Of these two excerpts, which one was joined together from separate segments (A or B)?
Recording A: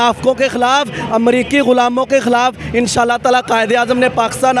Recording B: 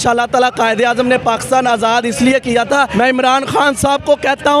B